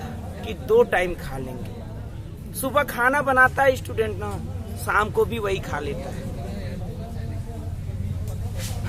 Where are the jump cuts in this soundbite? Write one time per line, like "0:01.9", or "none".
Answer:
none